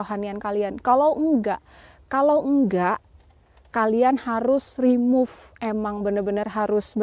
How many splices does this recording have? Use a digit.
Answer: 0